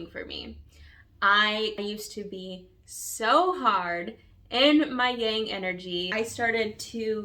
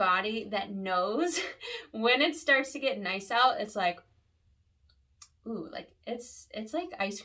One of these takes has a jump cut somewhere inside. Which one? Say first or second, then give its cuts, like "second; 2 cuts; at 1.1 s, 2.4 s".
first; 2 cuts; at 1.8 s, 6.1 s